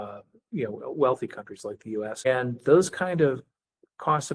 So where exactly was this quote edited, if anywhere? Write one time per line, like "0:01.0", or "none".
0:02.3